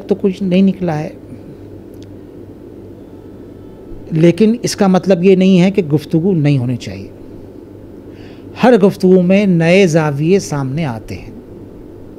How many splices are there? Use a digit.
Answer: 0